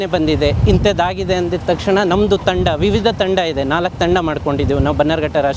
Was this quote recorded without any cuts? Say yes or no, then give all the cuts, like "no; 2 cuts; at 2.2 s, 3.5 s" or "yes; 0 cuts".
yes; 0 cuts